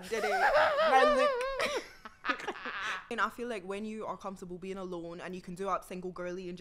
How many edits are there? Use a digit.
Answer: 1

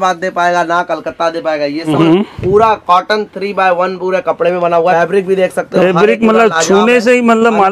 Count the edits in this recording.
2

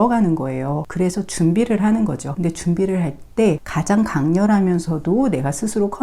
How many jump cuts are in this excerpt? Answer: 3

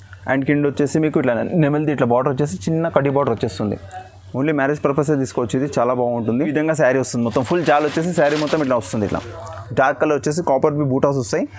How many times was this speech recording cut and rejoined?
1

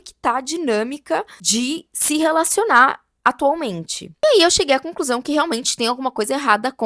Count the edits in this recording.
2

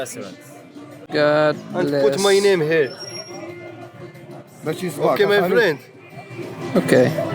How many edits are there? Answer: 1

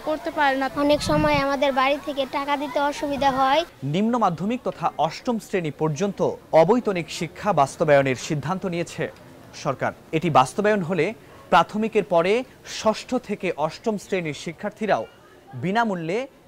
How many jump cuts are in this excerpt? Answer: 3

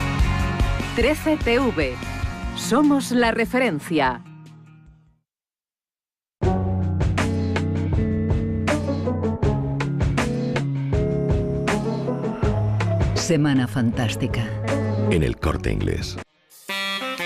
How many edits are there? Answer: 1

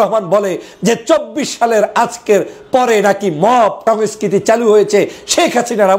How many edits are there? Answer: 1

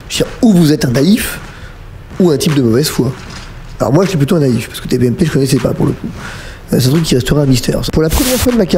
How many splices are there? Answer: 1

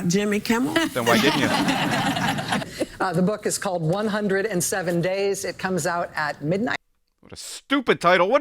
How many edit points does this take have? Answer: 1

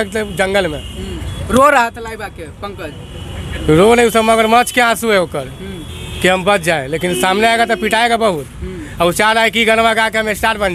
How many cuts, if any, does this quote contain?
0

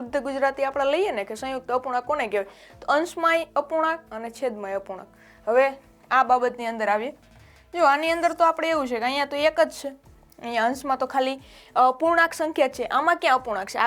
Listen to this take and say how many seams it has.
0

